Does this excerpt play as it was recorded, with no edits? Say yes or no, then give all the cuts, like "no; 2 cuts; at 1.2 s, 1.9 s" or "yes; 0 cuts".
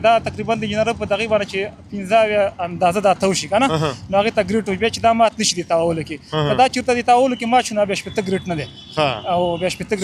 yes; 0 cuts